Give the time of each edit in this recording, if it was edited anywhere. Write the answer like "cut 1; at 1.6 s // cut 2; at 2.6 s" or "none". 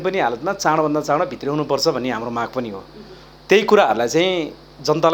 none